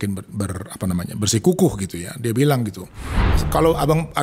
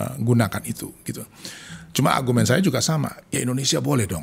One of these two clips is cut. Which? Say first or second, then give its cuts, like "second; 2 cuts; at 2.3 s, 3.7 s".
first; 1 cut; at 3.2 s